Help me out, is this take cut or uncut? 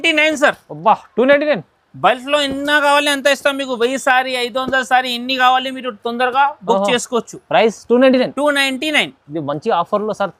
uncut